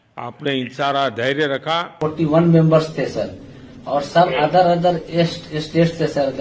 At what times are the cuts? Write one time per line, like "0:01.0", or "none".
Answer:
0:01.9